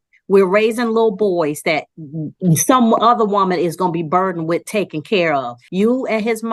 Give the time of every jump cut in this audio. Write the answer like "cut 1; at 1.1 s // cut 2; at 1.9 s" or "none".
cut 1; at 5.6 s